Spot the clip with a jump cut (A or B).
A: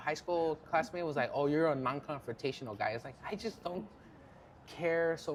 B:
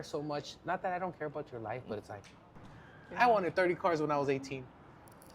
B